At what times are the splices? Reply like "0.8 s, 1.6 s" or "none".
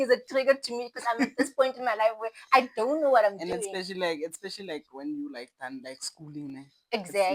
none